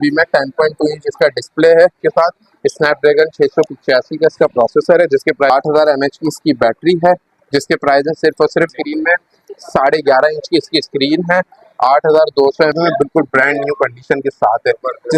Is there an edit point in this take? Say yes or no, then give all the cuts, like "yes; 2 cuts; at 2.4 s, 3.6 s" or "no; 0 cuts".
yes; 4 cuts; at 2.0 s, 5.5 s, 8.7 s, 12.7 s